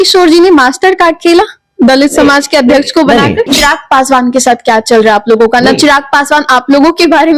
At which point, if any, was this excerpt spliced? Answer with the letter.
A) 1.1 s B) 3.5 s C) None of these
B